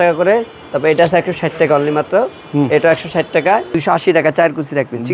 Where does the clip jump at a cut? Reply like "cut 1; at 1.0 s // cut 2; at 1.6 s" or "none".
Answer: cut 1; at 3.8 s